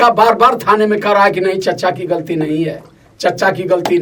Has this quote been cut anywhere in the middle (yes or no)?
no